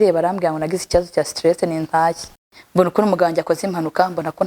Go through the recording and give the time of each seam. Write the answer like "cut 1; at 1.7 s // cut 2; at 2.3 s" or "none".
cut 1; at 2.6 s